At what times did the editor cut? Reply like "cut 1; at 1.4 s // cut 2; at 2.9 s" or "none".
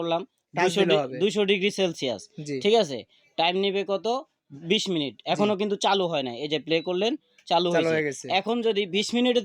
none